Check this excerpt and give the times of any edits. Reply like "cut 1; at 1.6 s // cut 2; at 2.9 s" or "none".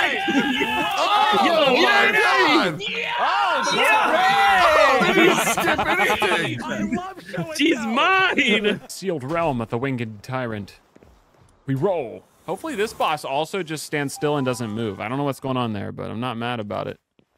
cut 1; at 8.8 s